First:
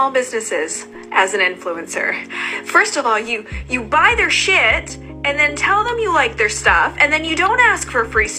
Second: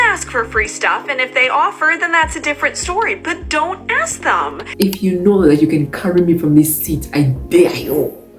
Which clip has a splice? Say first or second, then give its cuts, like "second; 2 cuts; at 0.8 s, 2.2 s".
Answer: second; 1 cut; at 4.6 s